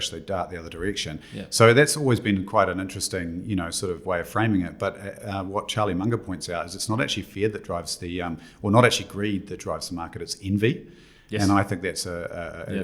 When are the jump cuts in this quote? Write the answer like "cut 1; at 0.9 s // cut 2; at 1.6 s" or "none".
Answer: none